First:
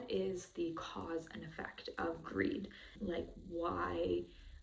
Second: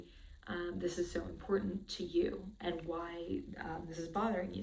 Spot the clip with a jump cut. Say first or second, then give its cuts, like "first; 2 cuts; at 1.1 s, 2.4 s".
first; 1 cut; at 2.9 s